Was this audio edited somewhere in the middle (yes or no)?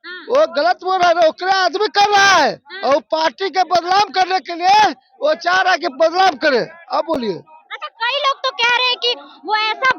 no